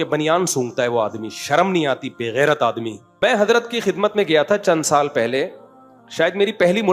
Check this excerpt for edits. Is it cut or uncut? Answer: cut